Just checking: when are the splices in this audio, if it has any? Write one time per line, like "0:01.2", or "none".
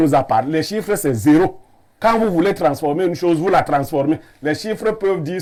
none